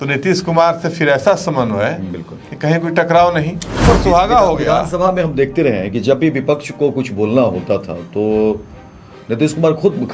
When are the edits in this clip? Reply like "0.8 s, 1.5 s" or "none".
3.8 s